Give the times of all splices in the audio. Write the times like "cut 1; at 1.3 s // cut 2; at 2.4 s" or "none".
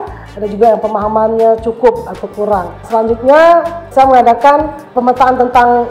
cut 1; at 2.8 s // cut 2; at 3.9 s // cut 3; at 4.8 s